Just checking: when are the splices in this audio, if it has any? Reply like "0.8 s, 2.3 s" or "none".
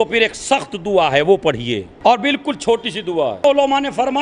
1.9 s, 3.4 s